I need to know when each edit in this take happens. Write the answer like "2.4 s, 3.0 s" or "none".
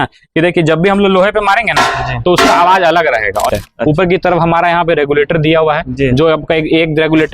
3.5 s